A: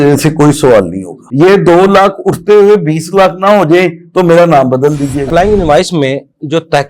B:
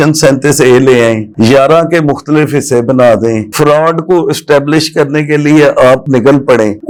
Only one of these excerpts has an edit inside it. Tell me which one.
A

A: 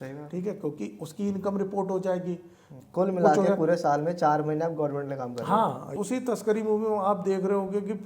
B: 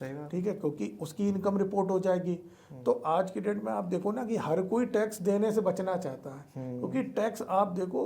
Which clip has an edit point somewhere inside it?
A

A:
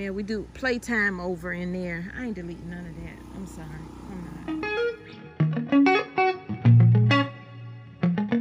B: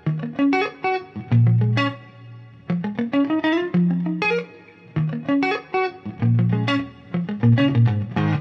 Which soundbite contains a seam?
A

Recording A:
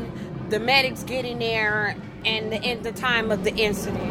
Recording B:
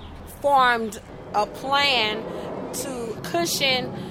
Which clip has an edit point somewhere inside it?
A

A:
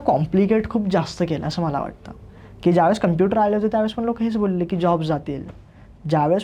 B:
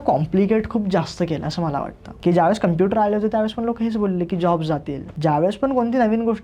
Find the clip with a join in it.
B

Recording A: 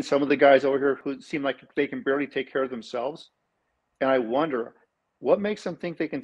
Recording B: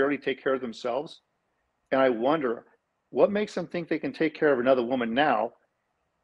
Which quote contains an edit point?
A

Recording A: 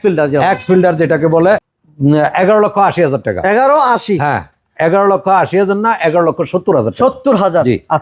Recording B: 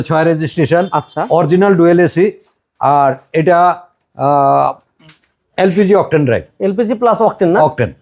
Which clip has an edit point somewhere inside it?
A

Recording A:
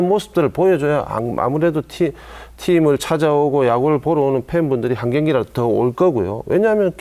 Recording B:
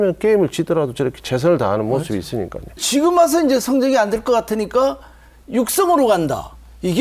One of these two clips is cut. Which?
B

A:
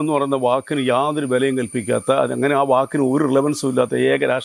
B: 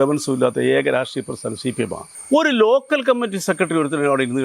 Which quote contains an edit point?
B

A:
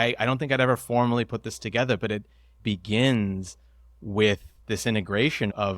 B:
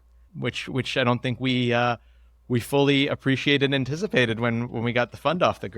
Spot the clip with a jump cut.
A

